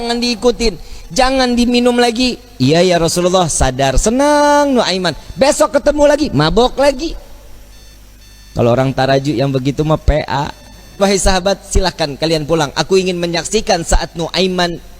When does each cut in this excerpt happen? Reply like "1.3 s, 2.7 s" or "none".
11.0 s

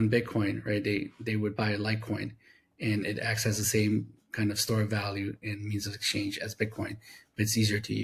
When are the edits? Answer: none

